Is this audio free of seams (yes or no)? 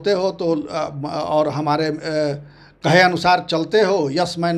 yes